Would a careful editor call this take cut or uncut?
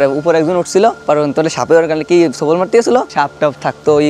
cut